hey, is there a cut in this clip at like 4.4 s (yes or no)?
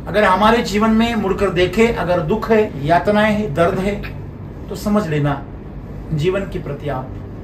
no